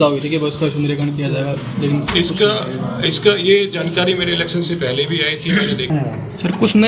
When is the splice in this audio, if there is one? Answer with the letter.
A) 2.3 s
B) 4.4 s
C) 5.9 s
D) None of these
C